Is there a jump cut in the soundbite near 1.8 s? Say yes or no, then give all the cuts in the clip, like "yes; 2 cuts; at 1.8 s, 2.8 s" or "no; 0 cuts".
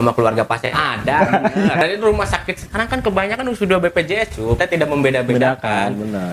yes; 2 cuts; at 1.8 s, 4.6 s